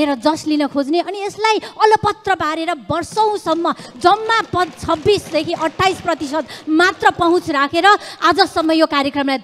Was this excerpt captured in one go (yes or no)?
yes